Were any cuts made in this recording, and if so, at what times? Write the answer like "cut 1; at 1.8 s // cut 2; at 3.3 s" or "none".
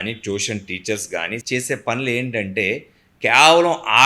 cut 1; at 1.4 s